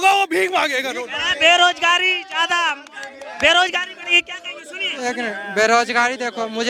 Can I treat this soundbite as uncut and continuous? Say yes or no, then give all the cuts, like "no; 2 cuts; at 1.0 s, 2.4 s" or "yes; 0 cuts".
yes; 0 cuts